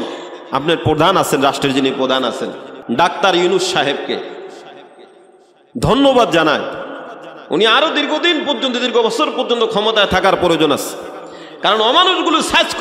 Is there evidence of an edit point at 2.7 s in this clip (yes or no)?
yes